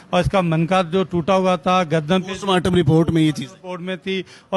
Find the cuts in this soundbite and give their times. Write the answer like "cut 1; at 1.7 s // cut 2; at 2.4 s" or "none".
none